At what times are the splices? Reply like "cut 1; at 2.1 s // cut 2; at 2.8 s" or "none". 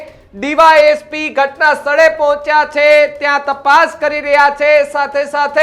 none